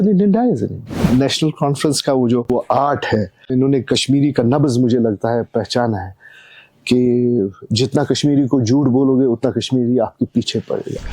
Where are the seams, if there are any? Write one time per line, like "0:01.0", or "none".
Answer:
0:01.1
0:02.5
0:03.5